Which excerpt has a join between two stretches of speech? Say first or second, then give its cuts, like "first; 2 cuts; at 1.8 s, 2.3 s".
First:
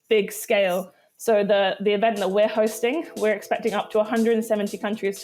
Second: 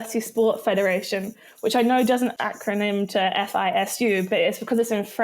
second; 1 cut; at 2.4 s